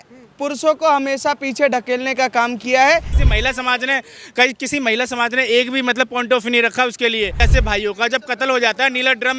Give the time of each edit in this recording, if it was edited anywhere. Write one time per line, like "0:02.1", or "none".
0:03.1
0:07.4